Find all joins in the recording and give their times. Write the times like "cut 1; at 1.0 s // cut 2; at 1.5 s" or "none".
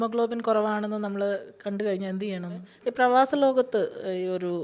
cut 1; at 2.7 s